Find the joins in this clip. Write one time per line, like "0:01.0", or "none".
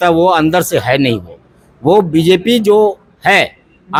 none